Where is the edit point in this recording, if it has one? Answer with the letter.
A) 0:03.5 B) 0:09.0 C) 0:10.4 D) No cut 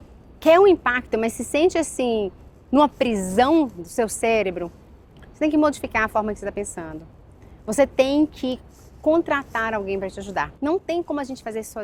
C